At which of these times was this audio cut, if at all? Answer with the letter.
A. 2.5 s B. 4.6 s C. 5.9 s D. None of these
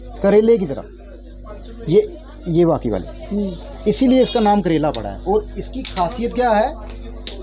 D